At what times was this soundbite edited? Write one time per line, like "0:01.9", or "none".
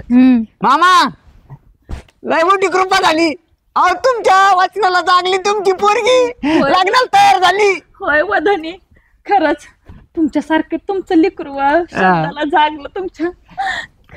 none